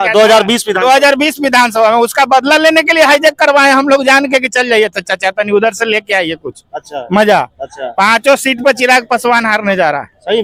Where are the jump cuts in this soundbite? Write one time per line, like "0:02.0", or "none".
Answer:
none